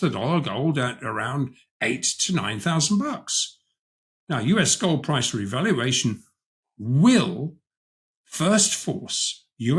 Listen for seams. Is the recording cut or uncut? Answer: uncut